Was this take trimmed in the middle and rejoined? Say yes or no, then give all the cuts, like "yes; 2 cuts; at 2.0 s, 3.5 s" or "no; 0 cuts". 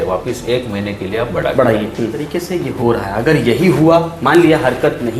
yes; 1 cut; at 2.2 s